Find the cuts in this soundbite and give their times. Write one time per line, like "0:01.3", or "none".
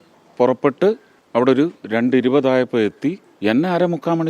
0:01.1
0:03.3